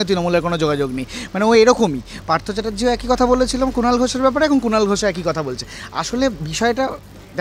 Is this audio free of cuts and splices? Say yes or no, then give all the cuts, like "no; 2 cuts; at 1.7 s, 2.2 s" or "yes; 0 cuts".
yes; 0 cuts